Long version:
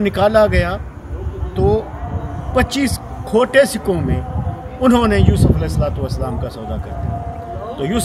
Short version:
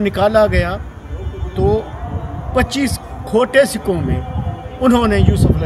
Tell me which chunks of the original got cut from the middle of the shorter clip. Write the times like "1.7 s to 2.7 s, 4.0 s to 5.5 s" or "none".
none